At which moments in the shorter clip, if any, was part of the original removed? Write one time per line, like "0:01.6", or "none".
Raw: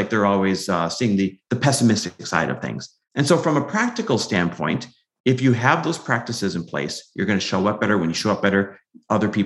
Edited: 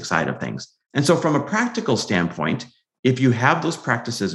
none